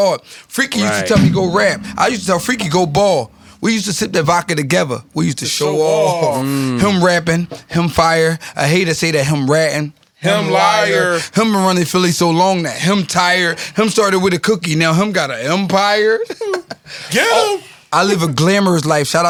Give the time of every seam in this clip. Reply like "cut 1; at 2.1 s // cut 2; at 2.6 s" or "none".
none